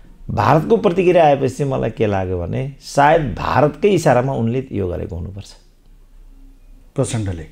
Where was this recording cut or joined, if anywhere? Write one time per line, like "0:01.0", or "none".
none